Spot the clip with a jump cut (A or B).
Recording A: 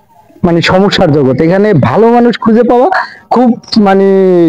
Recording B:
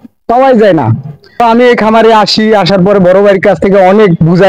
B